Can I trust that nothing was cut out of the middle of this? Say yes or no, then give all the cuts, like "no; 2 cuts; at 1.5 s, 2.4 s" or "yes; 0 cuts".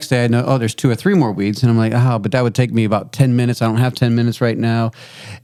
yes; 0 cuts